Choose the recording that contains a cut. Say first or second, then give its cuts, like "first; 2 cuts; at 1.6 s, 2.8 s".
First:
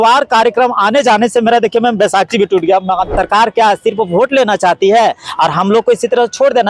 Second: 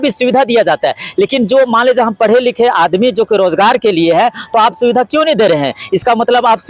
first; 1 cut; at 3.2 s